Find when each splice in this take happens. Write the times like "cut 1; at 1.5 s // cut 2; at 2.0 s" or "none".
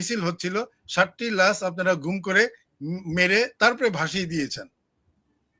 none